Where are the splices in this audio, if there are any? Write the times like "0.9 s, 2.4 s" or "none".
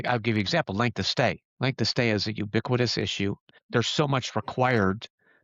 3.4 s